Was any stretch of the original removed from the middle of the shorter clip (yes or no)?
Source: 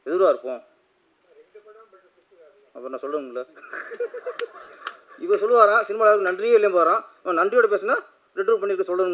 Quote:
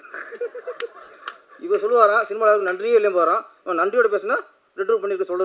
no